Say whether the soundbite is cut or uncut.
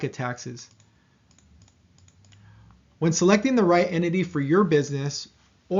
cut